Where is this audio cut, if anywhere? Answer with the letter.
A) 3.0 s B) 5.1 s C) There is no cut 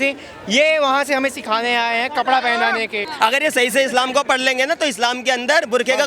A